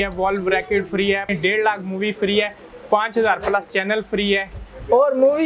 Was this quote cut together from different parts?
yes; 1 cut; at 1.3 s

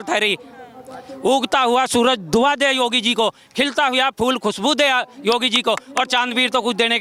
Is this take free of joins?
yes; 0 cuts

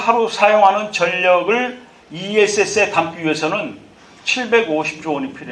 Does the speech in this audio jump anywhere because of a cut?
no; 0 cuts

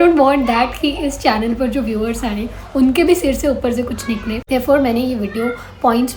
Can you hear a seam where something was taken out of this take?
no; 0 cuts

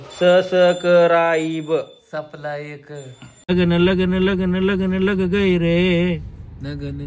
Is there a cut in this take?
yes; 1 cut; at 3.5 s

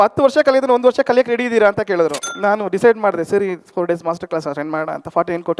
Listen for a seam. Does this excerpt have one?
yes; 1 cut; at 2.3 s

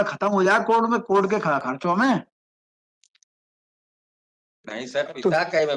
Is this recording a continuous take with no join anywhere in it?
yes; 0 cuts

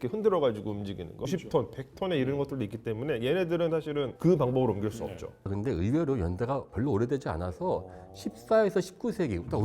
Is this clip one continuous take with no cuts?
no; 2 cuts; at 1.1 s, 5.5 s

